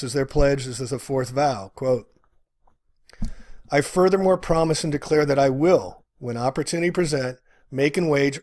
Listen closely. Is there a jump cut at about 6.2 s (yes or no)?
no